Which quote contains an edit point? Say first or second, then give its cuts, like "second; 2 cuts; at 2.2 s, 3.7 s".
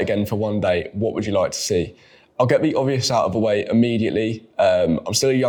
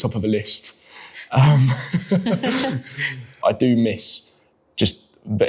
second; 1 cut; at 3.4 s